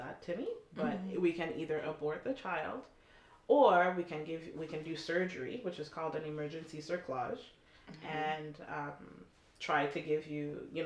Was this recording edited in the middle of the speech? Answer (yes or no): no